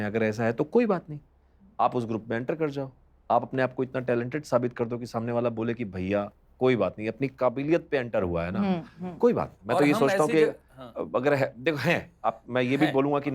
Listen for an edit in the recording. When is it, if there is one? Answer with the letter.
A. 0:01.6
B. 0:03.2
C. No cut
C